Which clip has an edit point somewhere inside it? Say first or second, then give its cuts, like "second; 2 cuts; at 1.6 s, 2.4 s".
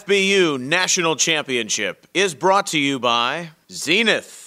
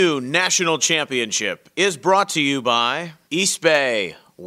second; 1 cut; at 3.1 s